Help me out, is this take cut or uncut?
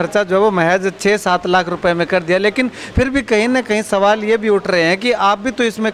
uncut